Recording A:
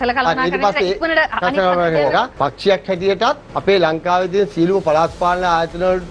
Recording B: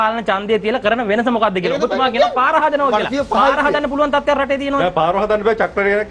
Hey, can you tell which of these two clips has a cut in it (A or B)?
A